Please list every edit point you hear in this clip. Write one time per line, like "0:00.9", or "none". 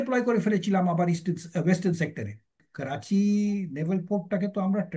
0:02.7